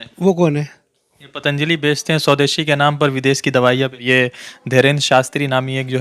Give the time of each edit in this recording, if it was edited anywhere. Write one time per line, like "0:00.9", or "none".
0:04.0